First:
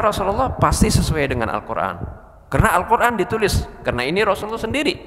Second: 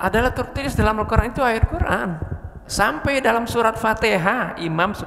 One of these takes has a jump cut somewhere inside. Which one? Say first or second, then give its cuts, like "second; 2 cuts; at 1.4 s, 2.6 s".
second; 1 cut; at 2.7 s